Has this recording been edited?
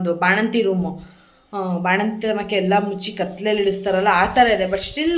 no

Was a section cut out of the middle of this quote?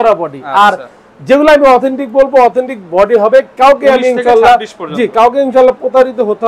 no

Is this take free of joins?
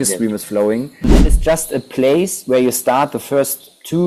no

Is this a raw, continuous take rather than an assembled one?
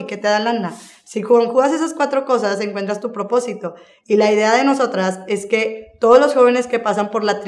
yes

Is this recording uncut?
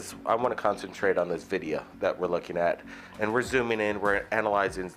no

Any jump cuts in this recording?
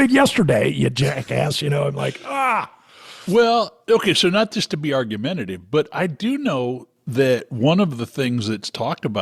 no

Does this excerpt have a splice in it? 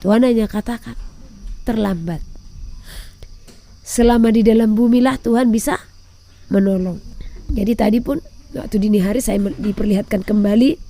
yes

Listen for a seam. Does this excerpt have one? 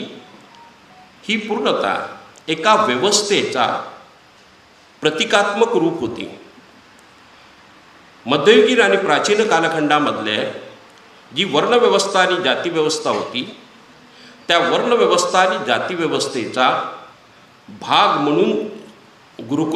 no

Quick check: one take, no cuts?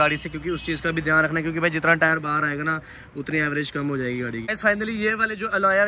no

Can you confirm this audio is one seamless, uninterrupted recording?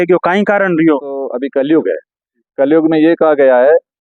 no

